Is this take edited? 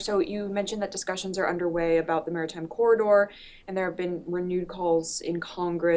yes; 1 cut; at 3.8 s

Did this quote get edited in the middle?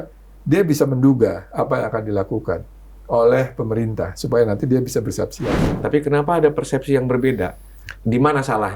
yes; 1 cut; at 5.8 s

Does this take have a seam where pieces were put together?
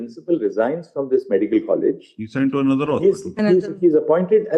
no; 0 cuts

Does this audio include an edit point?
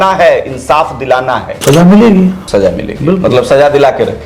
yes; 2 cuts; at 1.6 s, 2.4 s

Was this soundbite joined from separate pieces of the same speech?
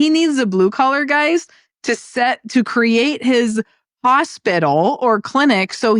no; 0 cuts

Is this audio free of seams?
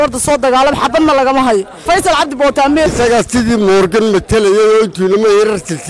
no; 2 cuts; at 1.7 s, 2.9 s

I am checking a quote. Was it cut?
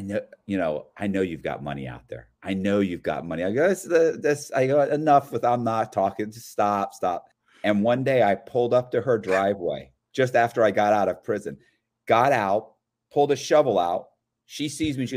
yes; 1 cut; at 7.3 s

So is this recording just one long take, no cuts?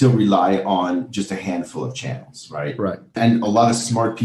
no; 1 cut; at 3.2 s

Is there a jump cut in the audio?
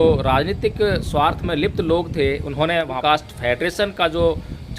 yes; 1 cut; at 3.0 s

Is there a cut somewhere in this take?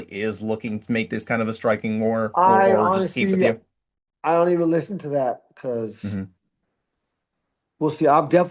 no; 0 cuts

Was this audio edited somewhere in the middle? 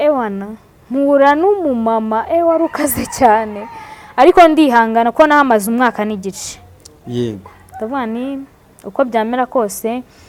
no; 0 cuts

